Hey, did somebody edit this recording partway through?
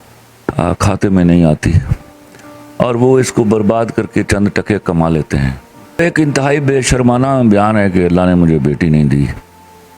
yes; 1 cut; at 6.0 s

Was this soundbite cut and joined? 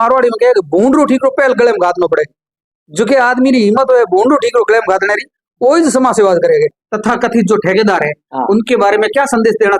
yes; 1 cut; at 6.8 s

